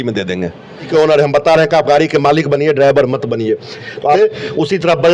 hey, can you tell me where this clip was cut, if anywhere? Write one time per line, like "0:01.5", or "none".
0:00.9
0:04.2